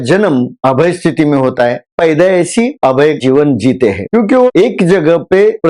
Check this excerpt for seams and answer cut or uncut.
cut